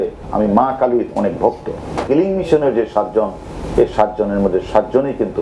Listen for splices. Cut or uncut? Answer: cut